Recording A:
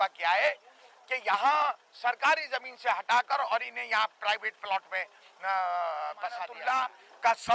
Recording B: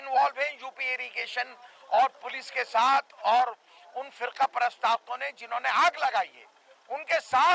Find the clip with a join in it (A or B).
A